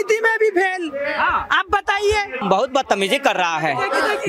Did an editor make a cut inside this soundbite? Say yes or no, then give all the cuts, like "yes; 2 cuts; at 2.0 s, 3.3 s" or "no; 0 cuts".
yes; 1 cut; at 2.4 s